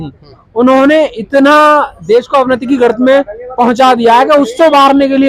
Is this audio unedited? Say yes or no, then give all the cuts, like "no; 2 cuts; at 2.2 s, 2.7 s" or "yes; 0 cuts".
yes; 0 cuts